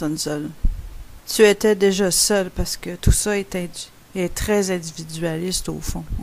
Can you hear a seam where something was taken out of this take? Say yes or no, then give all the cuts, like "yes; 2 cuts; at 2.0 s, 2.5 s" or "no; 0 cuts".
no; 0 cuts